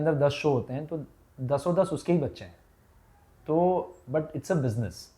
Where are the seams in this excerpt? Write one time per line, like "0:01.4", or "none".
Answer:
none